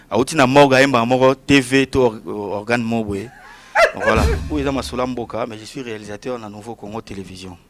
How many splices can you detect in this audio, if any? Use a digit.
1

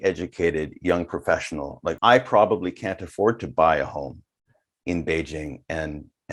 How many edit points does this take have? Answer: 1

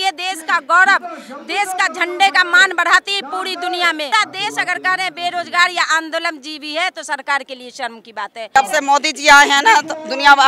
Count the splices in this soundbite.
2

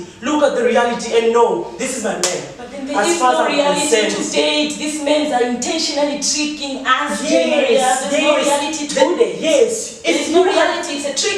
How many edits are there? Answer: 0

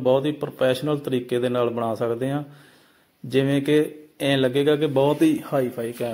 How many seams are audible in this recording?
0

